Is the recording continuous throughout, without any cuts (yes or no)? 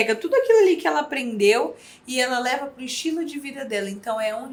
yes